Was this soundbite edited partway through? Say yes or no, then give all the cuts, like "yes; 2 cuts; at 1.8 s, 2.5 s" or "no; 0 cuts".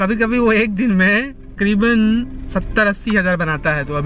yes; 1 cut; at 1.4 s